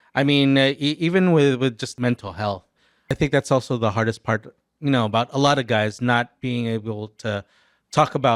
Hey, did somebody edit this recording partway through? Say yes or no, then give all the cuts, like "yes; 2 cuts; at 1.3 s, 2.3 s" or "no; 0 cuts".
yes; 2 cuts; at 1.9 s, 3.2 s